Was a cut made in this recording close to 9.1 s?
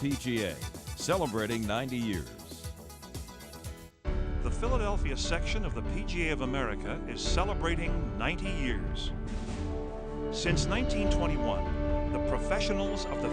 no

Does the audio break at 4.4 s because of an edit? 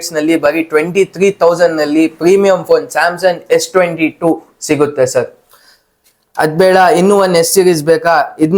no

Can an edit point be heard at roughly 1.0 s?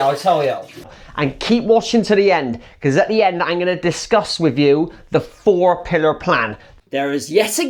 yes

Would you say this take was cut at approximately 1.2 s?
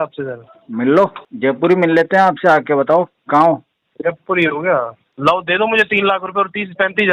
yes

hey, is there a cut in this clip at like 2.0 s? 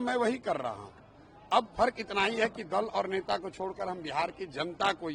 no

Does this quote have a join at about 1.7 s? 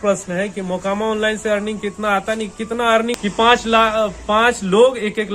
no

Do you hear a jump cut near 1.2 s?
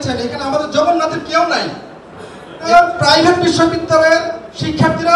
no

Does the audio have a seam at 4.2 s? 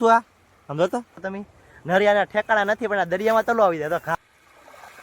yes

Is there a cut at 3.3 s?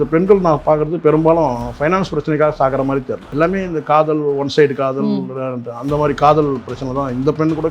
yes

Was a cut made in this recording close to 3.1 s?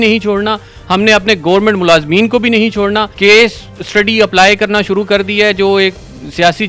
yes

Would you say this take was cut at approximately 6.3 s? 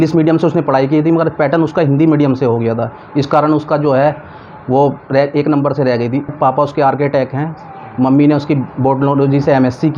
yes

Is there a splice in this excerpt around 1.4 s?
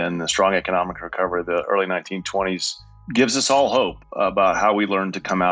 no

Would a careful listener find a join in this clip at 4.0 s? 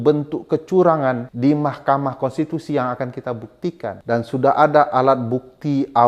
yes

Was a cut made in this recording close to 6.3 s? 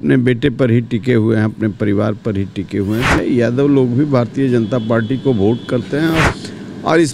yes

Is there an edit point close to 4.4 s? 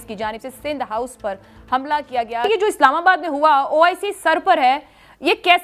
no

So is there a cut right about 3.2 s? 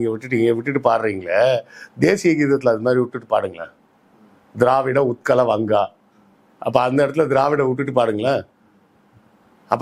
no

